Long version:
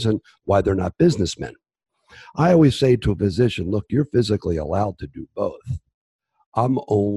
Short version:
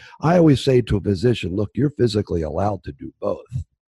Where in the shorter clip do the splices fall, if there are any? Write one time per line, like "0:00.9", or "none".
none